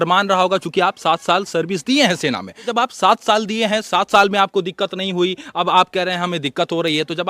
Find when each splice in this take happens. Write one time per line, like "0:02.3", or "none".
0:02.7